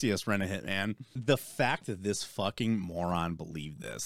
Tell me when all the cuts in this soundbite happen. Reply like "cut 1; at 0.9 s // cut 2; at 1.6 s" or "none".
cut 1; at 1.2 s